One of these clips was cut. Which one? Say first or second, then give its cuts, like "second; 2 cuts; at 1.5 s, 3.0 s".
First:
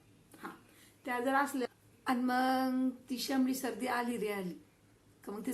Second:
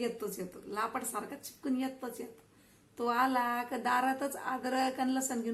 first; 1 cut; at 1.7 s